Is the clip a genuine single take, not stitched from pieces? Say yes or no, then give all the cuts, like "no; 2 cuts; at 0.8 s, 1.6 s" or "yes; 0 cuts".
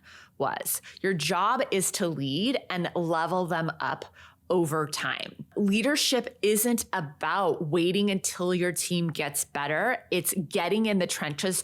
yes; 0 cuts